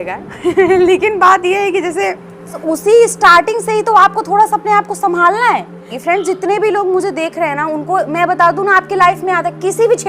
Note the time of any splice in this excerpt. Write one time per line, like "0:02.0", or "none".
0:02.6
0:06.0